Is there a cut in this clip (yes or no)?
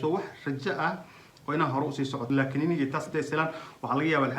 yes